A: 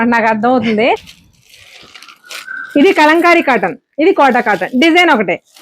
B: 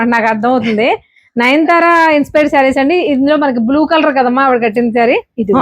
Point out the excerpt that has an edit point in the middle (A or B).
A